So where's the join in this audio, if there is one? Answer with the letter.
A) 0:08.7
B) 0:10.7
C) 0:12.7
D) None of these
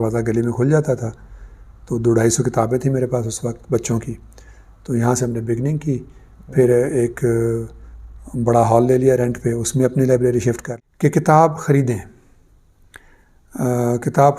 B